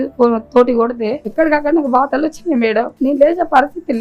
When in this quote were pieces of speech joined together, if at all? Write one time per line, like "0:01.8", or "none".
0:01.2
0:02.9